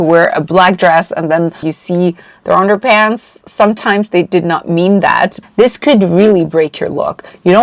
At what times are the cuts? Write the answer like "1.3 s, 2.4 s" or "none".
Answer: 1.7 s, 5.4 s